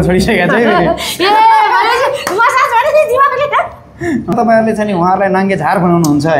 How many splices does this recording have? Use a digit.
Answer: 1